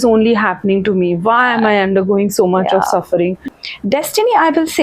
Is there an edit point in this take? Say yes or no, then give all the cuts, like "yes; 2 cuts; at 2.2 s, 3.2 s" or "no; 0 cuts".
yes; 1 cut; at 3.6 s